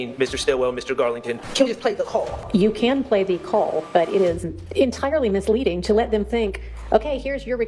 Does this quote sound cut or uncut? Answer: cut